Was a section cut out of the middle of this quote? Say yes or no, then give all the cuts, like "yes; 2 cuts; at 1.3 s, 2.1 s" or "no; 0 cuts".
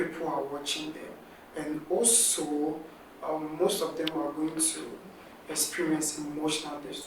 no; 0 cuts